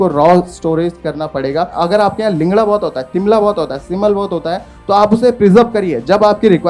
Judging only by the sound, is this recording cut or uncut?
cut